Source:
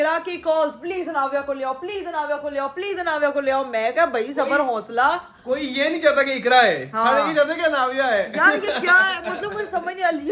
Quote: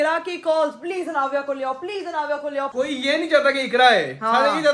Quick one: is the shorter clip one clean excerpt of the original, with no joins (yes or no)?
no